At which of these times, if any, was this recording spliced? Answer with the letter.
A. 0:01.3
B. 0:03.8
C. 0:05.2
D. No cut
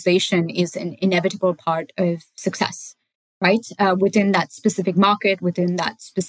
D